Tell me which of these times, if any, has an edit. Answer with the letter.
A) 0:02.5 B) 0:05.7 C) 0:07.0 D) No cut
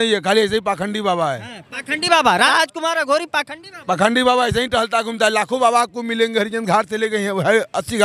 A